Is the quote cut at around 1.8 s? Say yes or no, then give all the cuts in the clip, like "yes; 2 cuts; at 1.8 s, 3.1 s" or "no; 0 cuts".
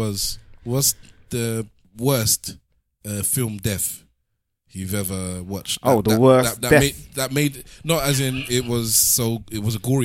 yes; 1 cut; at 1.8 s